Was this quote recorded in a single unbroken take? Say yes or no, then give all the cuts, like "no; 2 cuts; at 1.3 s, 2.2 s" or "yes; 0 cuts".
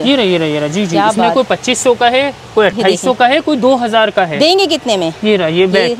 yes; 0 cuts